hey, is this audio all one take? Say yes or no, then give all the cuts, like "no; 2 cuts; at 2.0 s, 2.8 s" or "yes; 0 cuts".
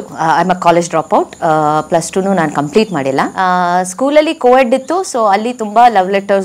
no; 1 cut; at 3.3 s